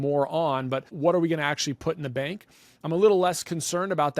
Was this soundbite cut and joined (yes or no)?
yes